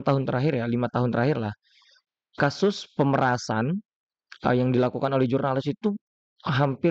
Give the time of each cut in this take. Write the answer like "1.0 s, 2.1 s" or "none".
none